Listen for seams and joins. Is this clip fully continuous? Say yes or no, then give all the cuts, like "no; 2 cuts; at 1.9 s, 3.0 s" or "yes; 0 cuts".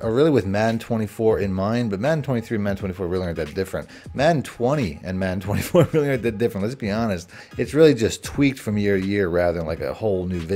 yes; 0 cuts